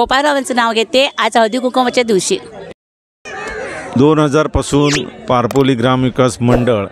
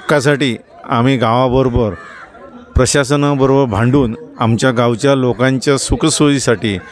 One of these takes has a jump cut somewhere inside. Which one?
first; 1 cut; at 2.8 s

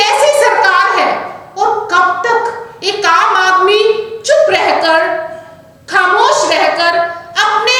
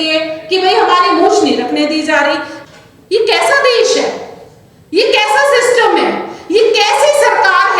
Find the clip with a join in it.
second; 1 cut; at 2.5 s

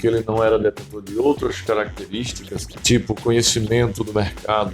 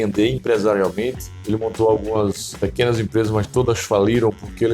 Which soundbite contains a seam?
second; 1 cut; at 2.5 s

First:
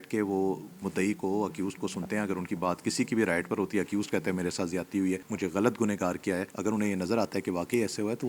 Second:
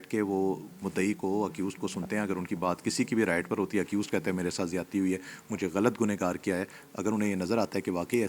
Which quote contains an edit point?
first; 2 cuts; at 5.3 s, 6.5 s

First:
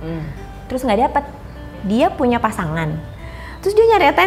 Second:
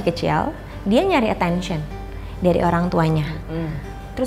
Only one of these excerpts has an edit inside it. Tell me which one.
first; 1 cut; at 1.8 s

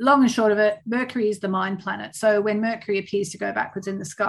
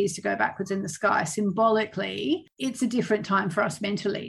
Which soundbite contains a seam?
second; 1 cut; at 2.5 s

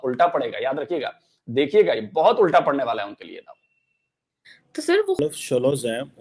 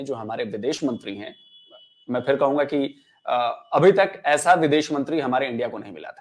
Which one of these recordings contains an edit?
first; 1 cut; at 5.2 s

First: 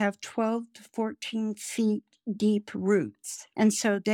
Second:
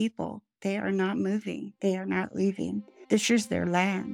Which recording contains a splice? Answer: second; 2 cuts; at 1.7 s, 2.9 s

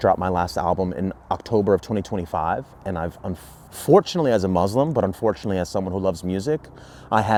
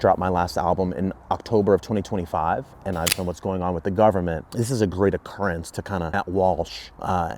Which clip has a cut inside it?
second; 2 cuts; at 3.2 s, 6.1 s

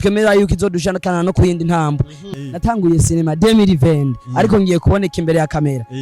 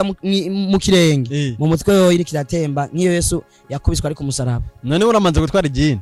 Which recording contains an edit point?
first; 1 cut; at 2.2 s

